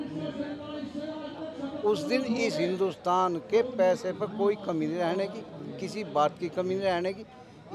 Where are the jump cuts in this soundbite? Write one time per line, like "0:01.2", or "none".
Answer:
none